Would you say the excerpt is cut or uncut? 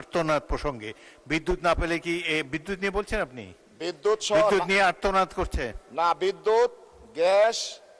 uncut